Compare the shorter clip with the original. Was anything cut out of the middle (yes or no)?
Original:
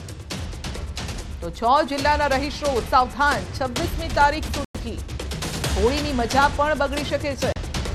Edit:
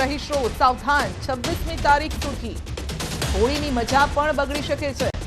yes